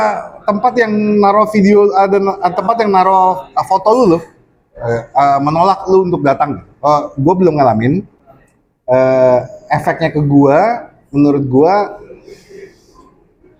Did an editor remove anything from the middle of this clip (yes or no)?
no